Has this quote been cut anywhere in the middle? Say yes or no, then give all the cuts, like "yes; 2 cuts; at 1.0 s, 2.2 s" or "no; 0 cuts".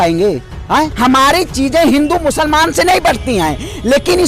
yes; 1 cut; at 0.9 s